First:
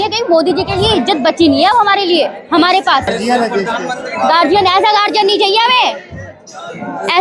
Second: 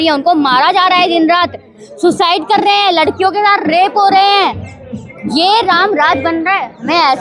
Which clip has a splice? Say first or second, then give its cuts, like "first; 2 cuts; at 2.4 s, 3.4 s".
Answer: first; 1 cut; at 3.1 s